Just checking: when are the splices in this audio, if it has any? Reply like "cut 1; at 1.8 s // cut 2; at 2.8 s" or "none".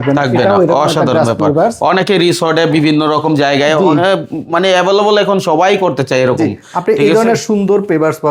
none